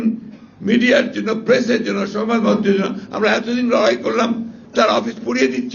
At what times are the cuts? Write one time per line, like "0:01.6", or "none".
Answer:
none